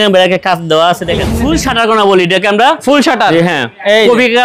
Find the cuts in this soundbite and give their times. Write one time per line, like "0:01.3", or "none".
0:01.3